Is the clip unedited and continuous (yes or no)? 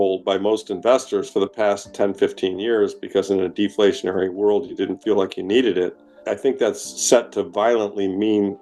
yes